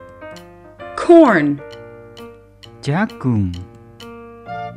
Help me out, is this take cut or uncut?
cut